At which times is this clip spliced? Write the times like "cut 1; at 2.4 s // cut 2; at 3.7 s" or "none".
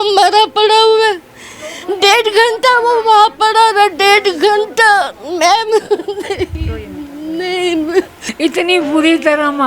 cut 1; at 8.2 s

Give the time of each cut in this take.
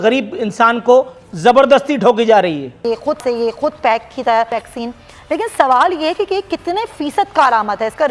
cut 1; at 2.8 s // cut 2; at 4.6 s

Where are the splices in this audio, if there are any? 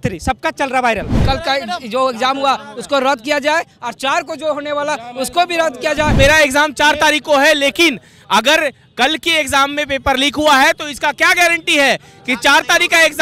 cut 1; at 1.1 s // cut 2; at 6.1 s

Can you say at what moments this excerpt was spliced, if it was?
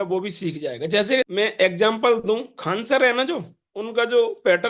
none

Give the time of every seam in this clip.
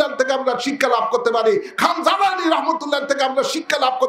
none

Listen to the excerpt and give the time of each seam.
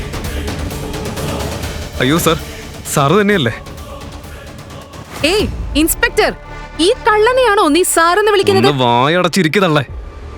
cut 1; at 1.8 s

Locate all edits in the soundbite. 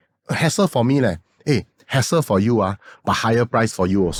none

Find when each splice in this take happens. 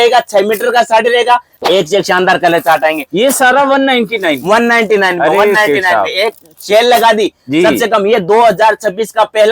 cut 1; at 1.5 s

